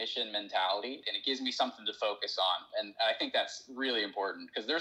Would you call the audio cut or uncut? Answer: cut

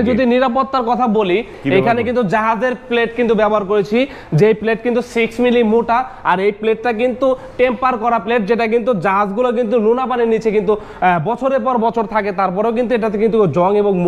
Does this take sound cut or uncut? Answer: cut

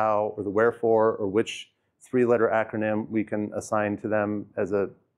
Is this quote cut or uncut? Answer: uncut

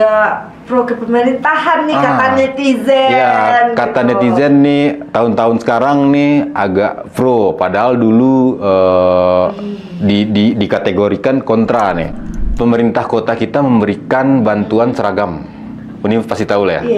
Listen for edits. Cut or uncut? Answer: cut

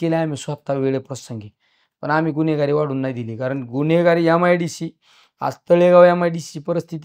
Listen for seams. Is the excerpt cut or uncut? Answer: uncut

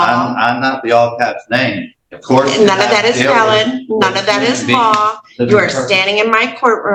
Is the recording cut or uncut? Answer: uncut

